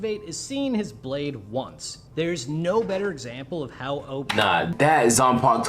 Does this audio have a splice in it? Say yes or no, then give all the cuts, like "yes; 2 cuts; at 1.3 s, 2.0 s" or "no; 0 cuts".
yes; 1 cut; at 4.7 s